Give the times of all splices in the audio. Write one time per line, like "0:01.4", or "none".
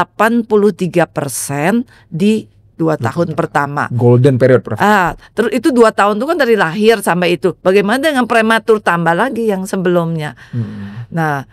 none